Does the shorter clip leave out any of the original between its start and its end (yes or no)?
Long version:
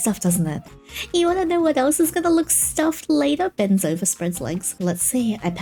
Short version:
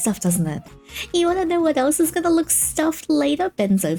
no